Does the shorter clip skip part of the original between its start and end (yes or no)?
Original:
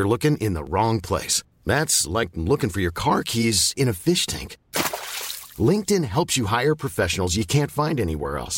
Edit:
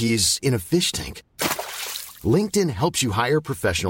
no